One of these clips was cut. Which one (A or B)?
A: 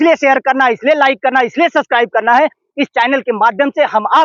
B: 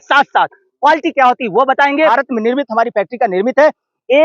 B